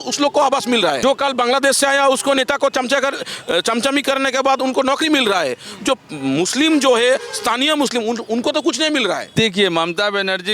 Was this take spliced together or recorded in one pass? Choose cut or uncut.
cut